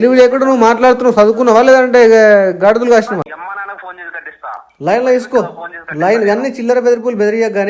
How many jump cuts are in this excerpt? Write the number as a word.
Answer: one